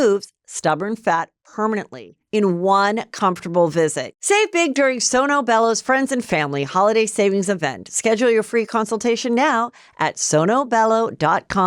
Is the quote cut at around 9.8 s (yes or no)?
no